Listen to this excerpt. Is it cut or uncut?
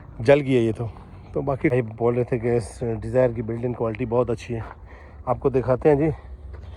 cut